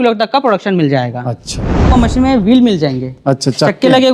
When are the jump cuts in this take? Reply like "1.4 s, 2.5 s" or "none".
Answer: 1.9 s